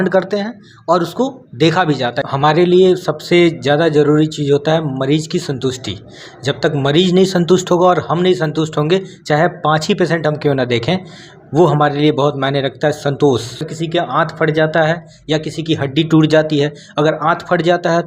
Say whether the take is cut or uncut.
cut